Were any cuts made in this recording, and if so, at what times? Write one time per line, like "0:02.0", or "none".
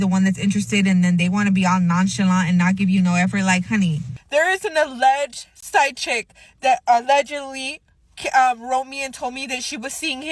0:04.1